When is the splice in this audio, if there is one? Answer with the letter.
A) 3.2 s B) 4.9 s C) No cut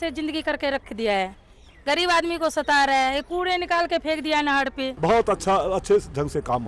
B